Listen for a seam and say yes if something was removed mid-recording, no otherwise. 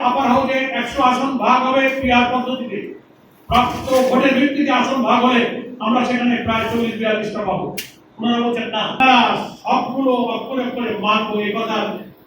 yes